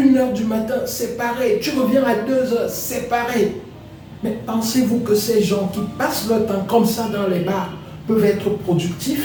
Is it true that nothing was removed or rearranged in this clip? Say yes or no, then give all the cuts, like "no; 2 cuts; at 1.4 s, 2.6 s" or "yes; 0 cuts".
yes; 0 cuts